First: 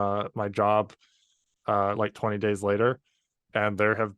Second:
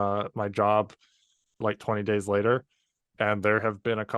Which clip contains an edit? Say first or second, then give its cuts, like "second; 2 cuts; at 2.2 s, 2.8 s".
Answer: second; 1 cut; at 1.6 s